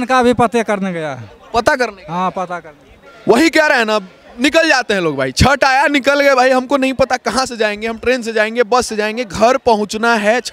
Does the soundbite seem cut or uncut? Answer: uncut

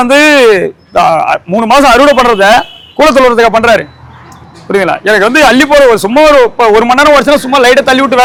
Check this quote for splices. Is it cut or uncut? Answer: uncut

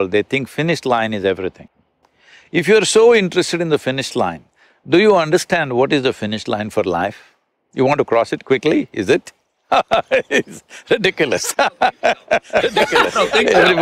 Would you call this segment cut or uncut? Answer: uncut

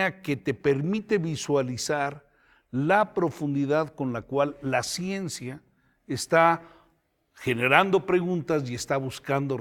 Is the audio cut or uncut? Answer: uncut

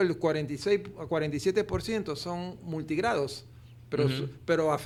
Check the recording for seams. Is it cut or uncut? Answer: uncut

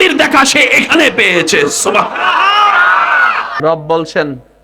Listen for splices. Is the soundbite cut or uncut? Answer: cut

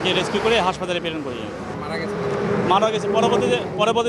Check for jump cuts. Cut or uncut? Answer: cut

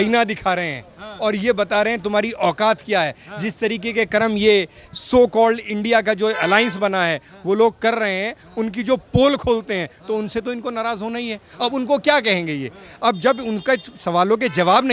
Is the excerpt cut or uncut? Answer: uncut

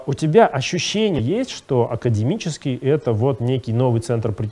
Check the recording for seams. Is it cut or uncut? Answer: cut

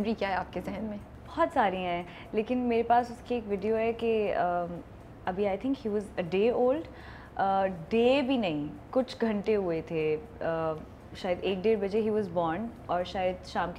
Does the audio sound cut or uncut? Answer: uncut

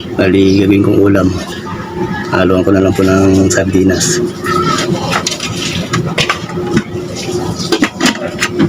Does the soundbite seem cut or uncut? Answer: uncut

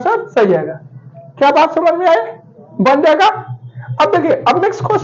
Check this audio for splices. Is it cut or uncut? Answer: uncut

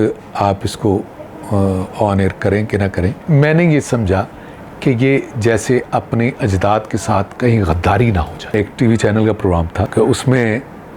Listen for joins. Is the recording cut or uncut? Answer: cut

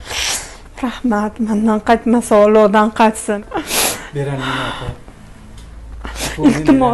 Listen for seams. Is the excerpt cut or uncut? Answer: cut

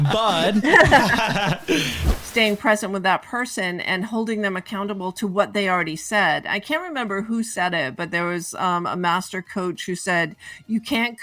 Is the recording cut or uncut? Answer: cut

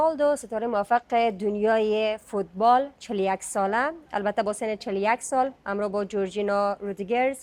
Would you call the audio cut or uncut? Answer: uncut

